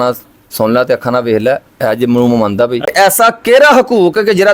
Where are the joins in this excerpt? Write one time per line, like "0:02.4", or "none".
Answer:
0:02.9